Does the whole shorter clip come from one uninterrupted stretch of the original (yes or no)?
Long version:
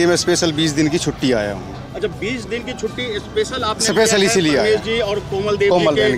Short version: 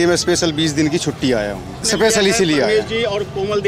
no